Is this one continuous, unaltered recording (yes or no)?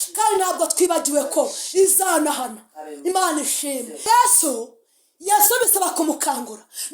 no